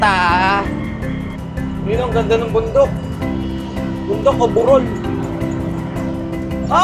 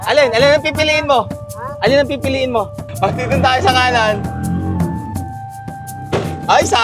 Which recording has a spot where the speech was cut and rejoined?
second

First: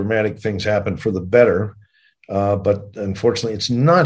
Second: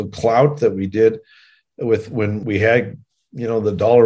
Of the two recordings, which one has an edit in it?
second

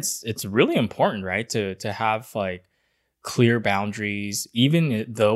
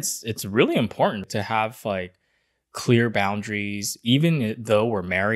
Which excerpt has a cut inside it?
second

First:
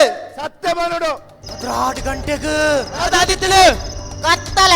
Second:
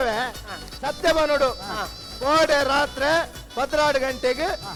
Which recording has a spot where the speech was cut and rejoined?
first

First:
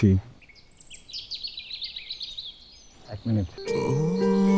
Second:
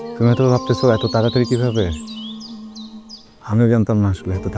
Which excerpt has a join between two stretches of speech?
first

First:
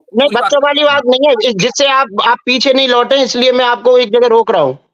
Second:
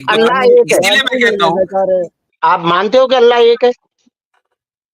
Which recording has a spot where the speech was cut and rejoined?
second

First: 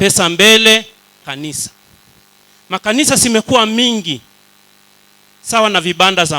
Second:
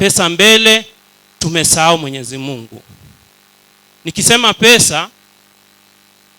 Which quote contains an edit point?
first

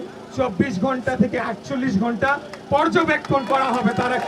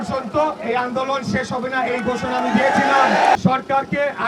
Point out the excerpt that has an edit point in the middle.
second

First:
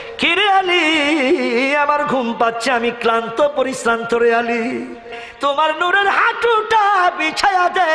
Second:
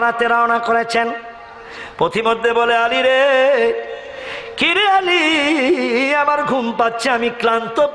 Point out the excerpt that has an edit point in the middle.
first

